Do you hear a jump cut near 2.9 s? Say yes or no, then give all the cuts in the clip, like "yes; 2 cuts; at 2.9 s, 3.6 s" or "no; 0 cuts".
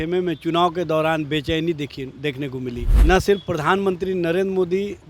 yes; 1 cut; at 2.9 s